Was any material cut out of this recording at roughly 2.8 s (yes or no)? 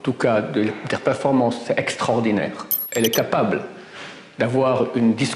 yes